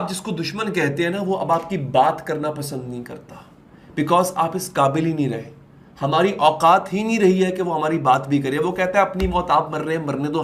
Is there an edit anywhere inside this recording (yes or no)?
no